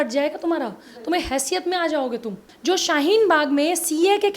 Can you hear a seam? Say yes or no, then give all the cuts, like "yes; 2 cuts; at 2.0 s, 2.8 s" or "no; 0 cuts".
yes; 1 cut; at 2.5 s